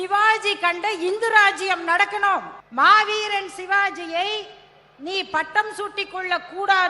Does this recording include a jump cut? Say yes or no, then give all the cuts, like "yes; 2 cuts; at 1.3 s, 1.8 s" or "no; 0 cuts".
yes; 1 cut; at 2.6 s